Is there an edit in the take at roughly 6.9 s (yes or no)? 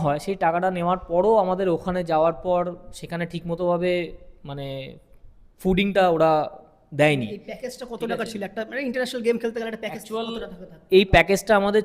no